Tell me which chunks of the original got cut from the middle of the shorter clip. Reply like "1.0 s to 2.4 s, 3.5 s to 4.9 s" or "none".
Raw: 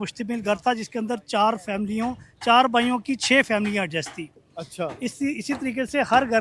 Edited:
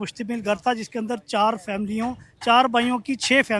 none